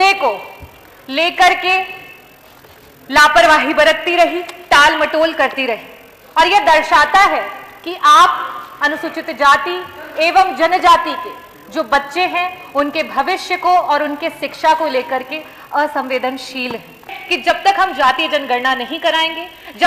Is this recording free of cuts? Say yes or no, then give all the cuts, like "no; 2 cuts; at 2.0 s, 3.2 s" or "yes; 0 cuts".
no; 1 cut; at 17.2 s